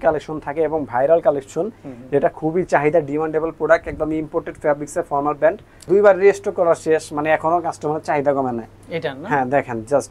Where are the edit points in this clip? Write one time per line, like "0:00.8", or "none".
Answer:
0:05.8